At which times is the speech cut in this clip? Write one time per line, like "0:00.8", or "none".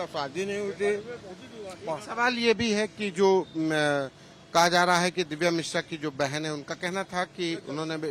none